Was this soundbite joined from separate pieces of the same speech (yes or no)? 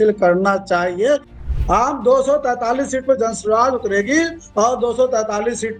yes